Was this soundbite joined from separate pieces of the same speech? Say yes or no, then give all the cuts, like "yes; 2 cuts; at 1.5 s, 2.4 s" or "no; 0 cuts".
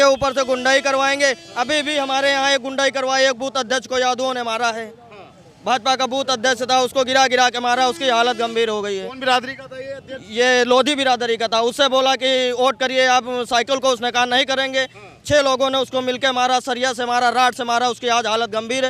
no; 0 cuts